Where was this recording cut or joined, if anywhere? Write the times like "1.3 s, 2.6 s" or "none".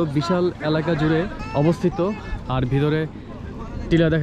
1.4 s